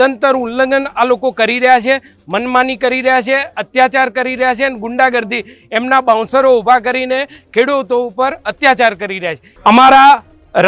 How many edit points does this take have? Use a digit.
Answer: 1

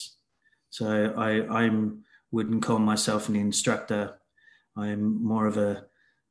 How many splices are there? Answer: 0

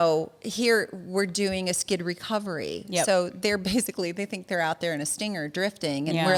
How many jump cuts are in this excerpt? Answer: 0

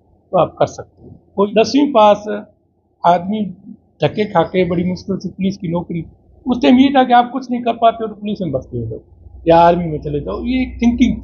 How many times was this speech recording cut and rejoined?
1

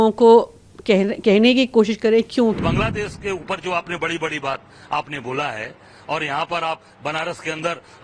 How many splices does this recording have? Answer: 1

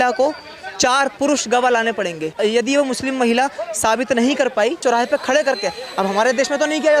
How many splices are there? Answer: 2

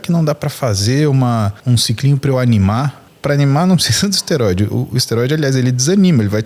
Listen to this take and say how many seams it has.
2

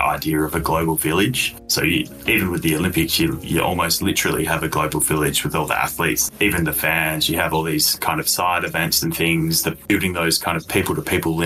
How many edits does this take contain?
2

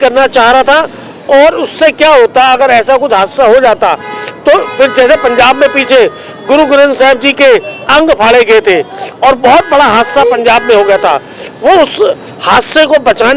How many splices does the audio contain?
0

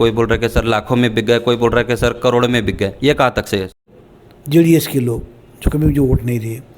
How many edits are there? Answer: 1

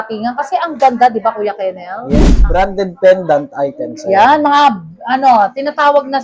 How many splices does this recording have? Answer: 1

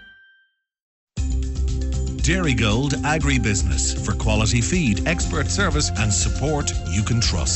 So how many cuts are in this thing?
1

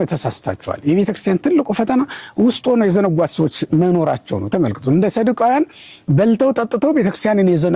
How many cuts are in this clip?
0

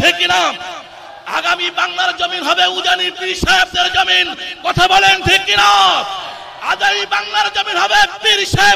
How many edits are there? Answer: 0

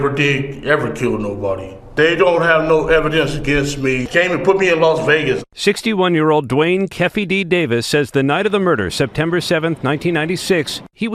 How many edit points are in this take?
0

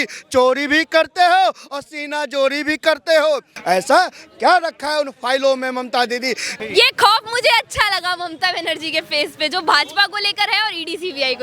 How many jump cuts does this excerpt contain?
2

